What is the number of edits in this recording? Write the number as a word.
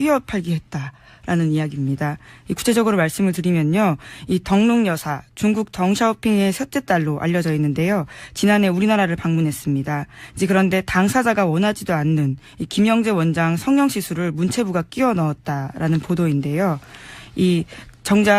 one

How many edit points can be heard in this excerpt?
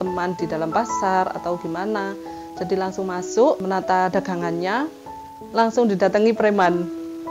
two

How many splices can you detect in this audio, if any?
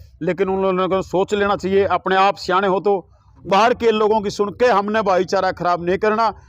one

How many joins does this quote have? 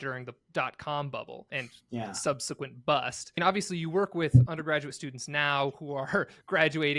two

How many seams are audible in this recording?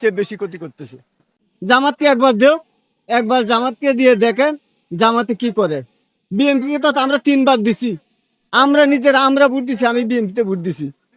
one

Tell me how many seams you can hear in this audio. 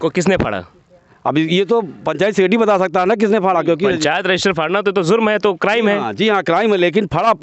zero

